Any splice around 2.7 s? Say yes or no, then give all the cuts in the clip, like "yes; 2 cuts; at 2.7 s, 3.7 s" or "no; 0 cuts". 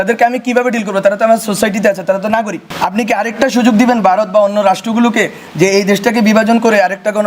yes; 1 cut; at 2.7 s